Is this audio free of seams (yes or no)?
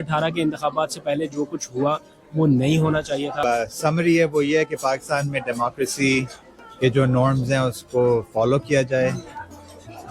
no